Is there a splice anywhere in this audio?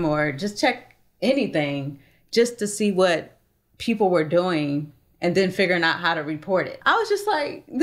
yes; 1 cut; at 6.8 s

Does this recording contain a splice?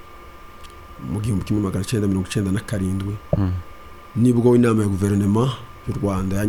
no; 0 cuts

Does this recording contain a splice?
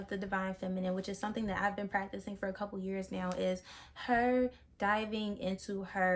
no; 0 cuts

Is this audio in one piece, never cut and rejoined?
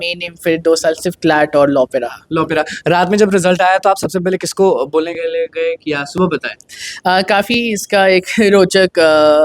yes; 0 cuts

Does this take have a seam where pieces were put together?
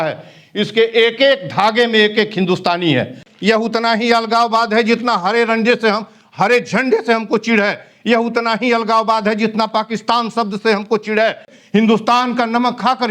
yes; 2 cuts; at 3.2 s, 11.5 s

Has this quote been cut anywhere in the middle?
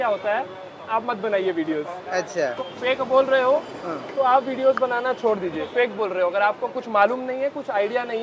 yes; 2 cuts; at 2.7 s, 5.7 s

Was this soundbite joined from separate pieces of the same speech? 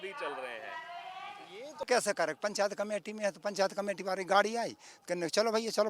yes; 1 cut; at 1.8 s

